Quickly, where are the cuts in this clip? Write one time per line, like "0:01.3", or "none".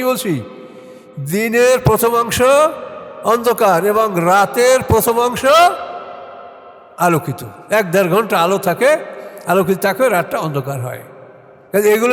none